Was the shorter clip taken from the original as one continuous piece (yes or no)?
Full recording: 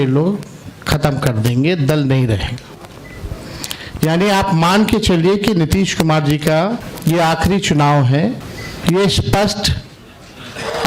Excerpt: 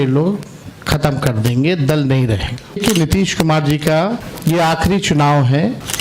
no